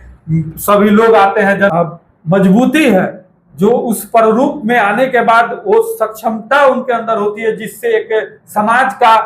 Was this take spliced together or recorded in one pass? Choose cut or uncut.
cut